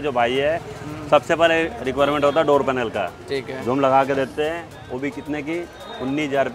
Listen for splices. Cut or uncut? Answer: uncut